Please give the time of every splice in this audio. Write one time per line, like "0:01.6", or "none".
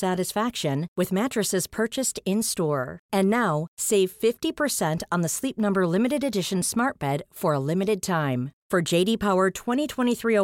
none